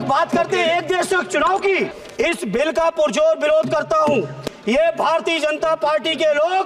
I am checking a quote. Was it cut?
yes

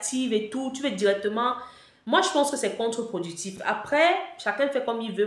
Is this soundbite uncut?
yes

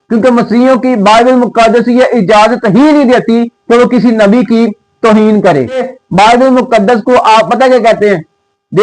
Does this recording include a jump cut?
yes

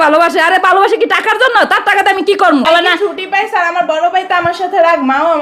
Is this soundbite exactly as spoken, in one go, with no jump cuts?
no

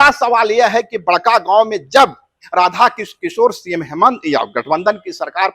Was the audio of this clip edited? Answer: no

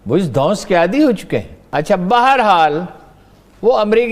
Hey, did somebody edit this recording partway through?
yes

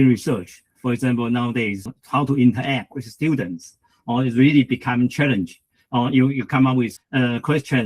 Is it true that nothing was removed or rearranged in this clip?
no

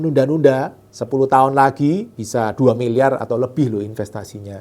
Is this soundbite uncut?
no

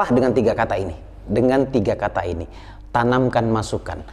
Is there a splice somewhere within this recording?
yes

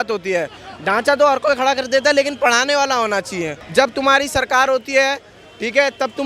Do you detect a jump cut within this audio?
yes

